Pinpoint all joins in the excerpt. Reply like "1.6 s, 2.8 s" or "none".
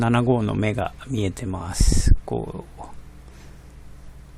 2.4 s

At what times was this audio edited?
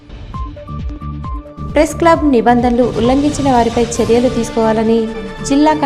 1.2 s

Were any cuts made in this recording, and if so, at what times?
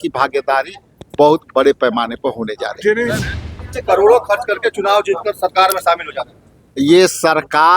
3.3 s

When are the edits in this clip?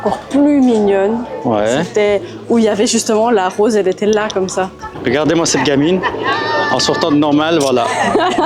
4.8 s

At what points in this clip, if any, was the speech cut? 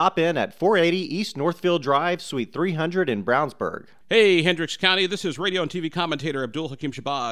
3.9 s

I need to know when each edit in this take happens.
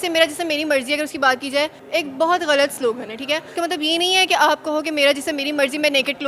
1.8 s, 3.5 s

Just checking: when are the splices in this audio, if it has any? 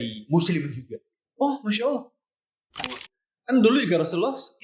2.9 s

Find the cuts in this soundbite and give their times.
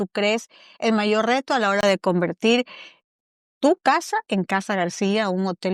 none

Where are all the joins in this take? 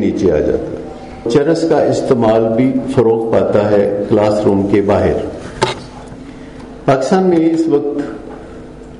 1.2 s, 6.6 s

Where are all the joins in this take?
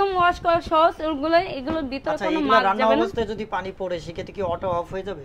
none

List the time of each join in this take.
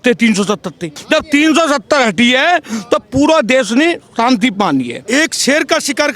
1.0 s, 5.0 s

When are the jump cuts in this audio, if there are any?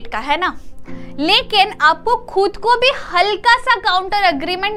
none

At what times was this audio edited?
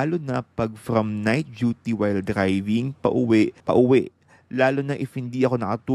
3.6 s

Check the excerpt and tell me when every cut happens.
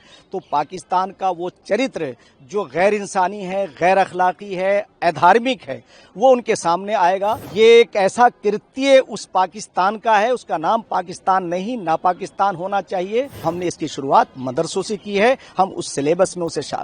7.4 s, 13.4 s

